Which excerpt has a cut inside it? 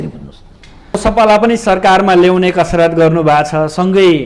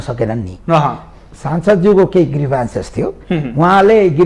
first; 1 cut; at 1.0 s

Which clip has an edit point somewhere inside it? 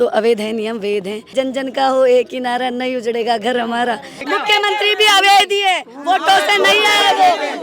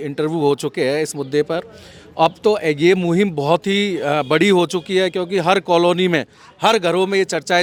first; 2 cuts; at 1.3 s, 4.3 s

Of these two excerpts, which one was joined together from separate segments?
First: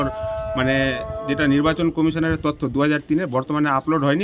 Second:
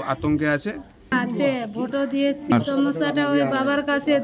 second; 2 cuts; at 1.1 s, 2.5 s

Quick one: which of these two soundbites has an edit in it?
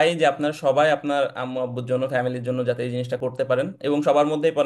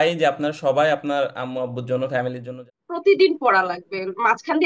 second; 1 cut; at 2.6 s

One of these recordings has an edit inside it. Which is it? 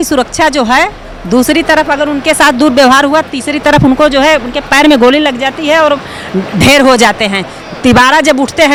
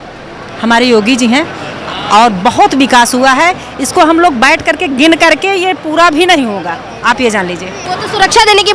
second; 1 cut; at 7.7 s

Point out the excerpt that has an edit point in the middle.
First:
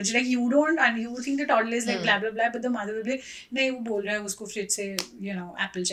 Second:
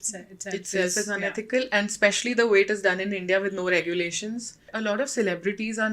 second; 1 cut; at 4.7 s

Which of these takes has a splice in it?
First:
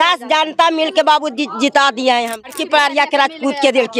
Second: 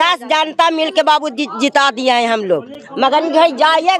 first; 1 cut; at 2.5 s

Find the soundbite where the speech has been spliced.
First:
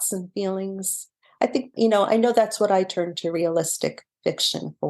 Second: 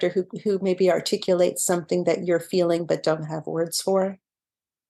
first; 1 cut; at 1.7 s

